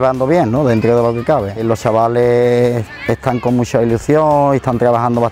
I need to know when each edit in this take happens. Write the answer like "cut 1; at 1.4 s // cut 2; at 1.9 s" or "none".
cut 1; at 1.6 s